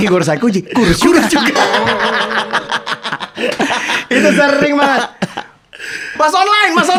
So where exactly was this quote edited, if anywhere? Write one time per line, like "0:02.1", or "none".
none